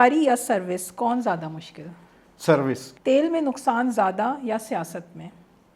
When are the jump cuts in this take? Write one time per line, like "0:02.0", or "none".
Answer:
0:02.9